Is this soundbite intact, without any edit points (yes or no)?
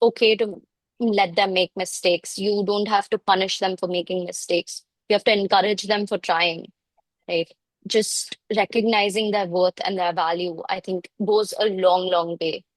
yes